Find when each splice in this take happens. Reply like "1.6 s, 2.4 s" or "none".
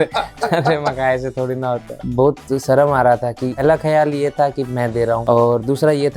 2.1 s, 3.4 s, 5.2 s